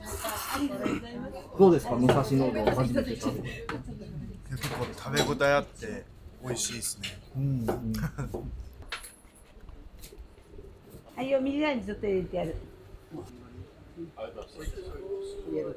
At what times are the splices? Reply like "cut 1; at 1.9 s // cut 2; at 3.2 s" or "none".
cut 1; at 8.7 s // cut 2; at 11.0 s // cut 3; at 13.3 s

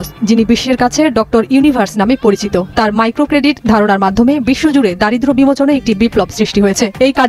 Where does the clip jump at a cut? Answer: none

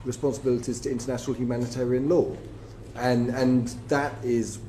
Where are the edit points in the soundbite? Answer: none

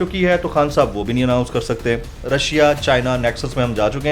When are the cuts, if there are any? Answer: cut 1; at 2.1 s

